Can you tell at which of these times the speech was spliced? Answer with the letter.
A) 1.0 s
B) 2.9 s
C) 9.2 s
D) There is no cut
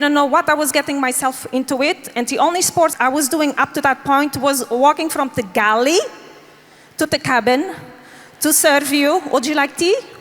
B